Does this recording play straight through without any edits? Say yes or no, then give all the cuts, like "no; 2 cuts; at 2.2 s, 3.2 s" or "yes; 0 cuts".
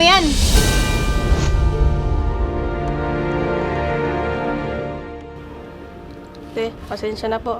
yes; 0 cuts